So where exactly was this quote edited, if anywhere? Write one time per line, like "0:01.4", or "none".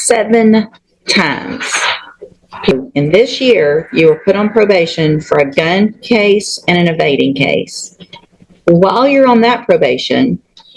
0:02.7

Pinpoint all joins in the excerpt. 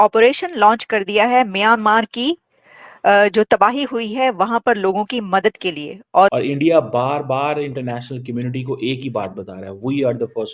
0:06.3

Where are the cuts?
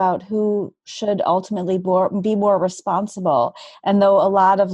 none

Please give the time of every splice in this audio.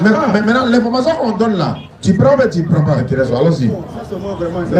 0:03.0

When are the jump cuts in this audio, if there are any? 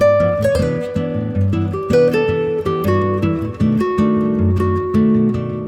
none

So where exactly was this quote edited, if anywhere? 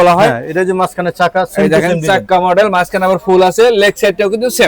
none

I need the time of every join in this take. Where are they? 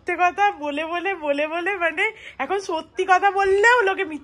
none

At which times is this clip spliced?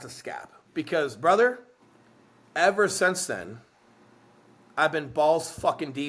none

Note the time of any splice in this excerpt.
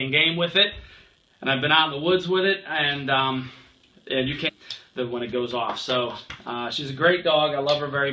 none

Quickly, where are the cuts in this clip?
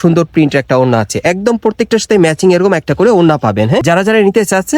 0:03.8

